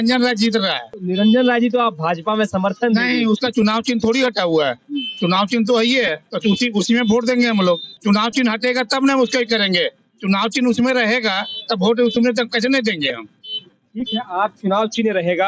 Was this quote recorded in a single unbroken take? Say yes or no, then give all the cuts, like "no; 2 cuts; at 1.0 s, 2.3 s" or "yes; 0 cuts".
yes; 0 cuts